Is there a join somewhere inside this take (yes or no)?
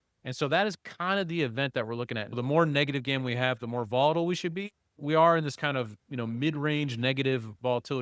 yes